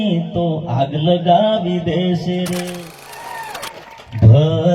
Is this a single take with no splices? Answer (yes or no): no